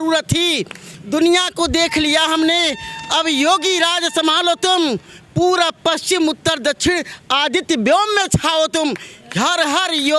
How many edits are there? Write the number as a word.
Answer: zero